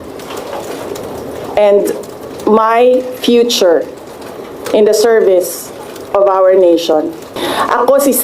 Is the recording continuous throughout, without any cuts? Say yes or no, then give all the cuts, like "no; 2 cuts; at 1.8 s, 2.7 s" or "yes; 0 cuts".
no; 1 cut; at 7.3 s